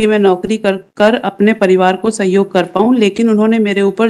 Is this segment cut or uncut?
uncut